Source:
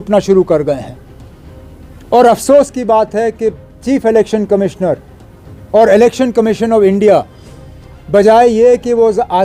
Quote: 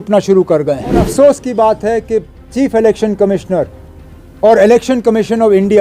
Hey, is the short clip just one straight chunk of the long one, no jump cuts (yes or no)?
no